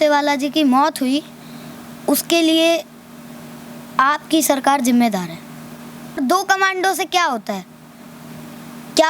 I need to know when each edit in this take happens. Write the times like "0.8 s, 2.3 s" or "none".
6.2 s